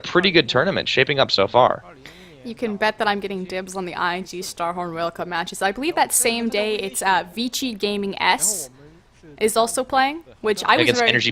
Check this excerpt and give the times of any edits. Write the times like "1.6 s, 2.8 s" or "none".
2.6 s